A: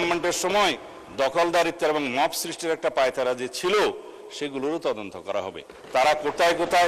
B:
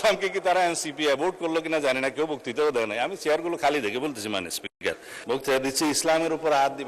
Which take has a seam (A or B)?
B